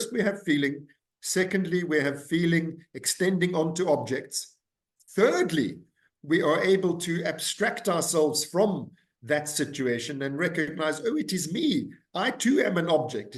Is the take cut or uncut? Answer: uncut